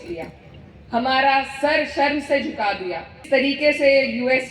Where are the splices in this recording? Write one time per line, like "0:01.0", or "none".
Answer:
0:03.2